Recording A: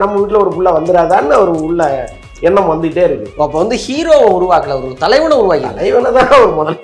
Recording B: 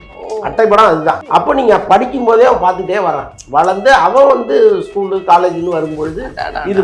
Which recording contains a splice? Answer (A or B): B